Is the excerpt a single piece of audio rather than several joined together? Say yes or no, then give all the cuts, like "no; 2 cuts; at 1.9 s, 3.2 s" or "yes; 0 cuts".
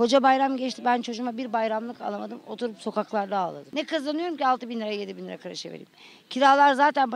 no; 1 cut; at 3.6 s